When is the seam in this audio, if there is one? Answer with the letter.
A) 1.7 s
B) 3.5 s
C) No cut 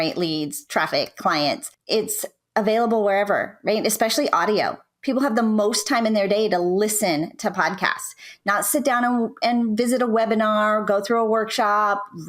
A